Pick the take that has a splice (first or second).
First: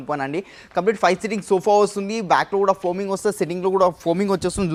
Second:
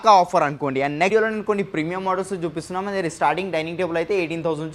second